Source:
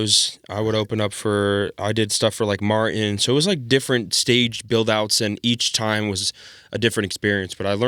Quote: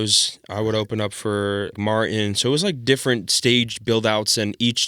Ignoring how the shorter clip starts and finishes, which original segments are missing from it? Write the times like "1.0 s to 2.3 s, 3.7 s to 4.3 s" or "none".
1.8 s to 2.6 s